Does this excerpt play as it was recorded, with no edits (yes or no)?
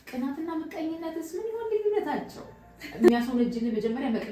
no